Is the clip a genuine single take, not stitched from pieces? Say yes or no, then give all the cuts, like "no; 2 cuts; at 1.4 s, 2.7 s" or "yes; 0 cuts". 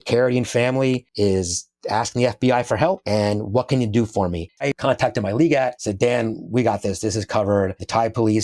no; 2 cuts; at 1.1 s, 4.6 s